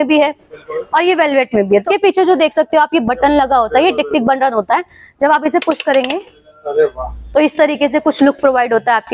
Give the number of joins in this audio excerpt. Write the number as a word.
one